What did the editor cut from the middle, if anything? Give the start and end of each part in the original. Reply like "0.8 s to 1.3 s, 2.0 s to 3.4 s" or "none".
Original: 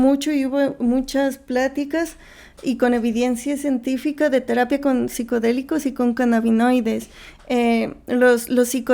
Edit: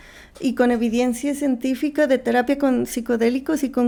none